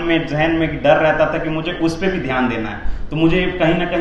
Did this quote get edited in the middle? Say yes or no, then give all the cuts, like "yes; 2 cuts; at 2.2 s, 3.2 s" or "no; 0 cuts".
no; 0 cuts